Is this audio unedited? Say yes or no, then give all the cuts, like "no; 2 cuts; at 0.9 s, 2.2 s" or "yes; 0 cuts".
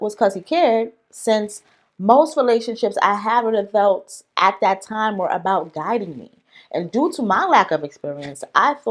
yes; 0 cuts